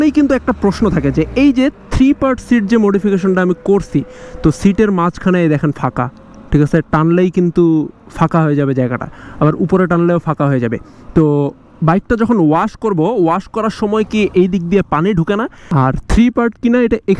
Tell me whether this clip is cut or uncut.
cut